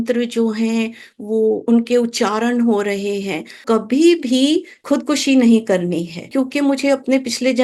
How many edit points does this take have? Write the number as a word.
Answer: three